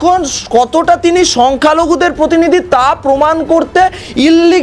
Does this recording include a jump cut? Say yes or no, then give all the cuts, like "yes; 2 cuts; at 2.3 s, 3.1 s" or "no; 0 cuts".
no; 0 cuts